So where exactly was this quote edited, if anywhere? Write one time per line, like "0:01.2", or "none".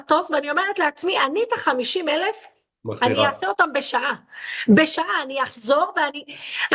none